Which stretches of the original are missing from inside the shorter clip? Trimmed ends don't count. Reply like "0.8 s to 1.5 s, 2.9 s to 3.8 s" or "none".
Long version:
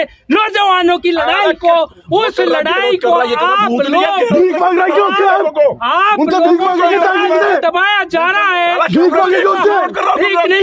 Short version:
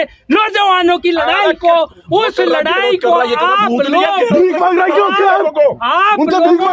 none